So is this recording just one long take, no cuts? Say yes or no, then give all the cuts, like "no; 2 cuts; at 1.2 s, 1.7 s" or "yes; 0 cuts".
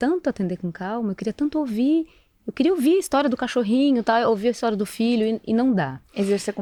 yes; 0 cuts